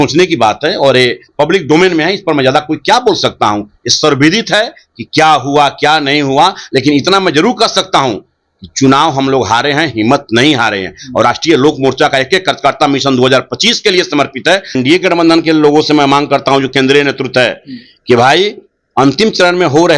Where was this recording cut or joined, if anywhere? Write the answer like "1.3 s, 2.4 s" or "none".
14.8 s